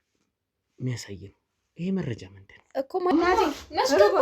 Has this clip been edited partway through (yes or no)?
yes